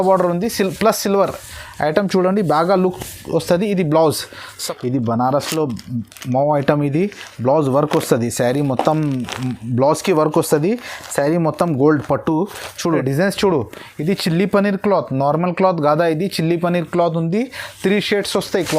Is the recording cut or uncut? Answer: cut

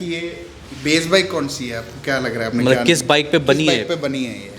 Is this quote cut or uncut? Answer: uncut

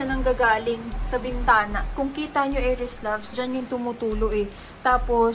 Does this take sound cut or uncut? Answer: cut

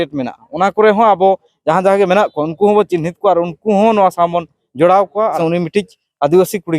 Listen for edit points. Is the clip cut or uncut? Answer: cut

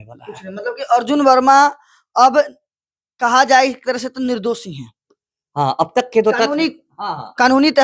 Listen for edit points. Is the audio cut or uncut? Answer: uncut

